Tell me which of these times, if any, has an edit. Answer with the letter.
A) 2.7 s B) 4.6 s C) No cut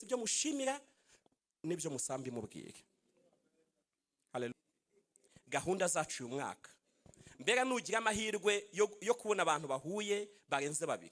B